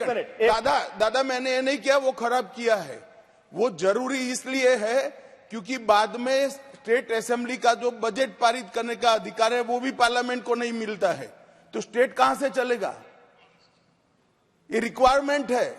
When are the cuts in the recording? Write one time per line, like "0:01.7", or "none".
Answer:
none

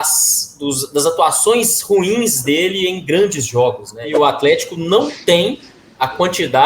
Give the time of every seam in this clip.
0:04.1

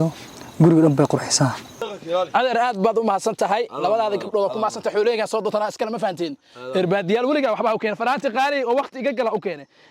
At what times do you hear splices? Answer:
0:01.9

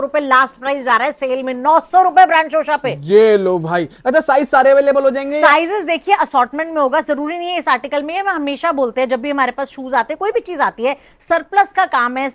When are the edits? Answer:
none

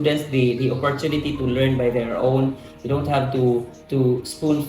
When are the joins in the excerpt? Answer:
none

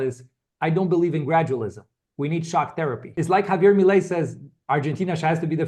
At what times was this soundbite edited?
0:03.1

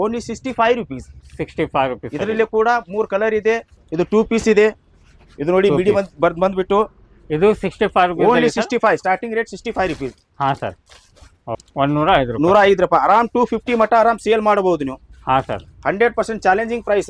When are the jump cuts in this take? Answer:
none

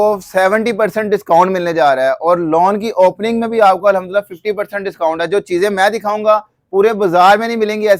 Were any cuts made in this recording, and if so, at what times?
none

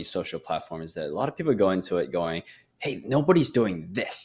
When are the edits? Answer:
none

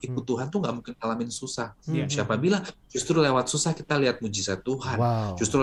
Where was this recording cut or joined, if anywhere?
none

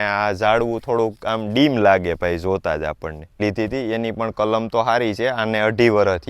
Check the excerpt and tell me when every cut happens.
0:03.3

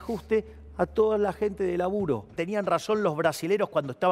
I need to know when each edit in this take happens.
0:02.3

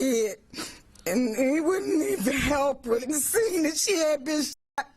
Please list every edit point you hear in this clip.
0:03.0

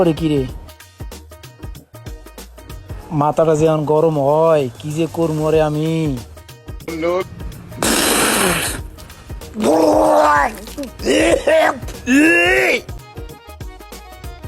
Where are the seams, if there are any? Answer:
0:06.9
0:13.0

